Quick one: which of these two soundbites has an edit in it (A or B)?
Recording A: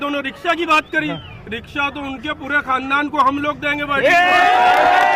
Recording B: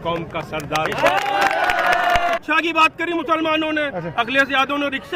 B